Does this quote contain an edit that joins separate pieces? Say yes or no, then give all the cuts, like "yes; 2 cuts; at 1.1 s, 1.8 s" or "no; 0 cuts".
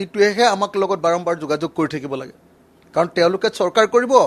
no; 0 cuts